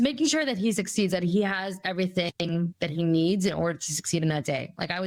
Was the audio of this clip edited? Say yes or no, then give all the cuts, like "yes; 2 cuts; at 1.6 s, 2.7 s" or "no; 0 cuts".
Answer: no; 0 cuts